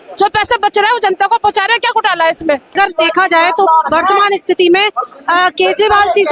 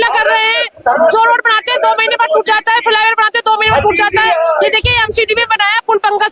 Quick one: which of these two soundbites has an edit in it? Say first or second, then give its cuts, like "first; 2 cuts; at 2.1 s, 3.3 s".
first; 1 cut; at 2.8 s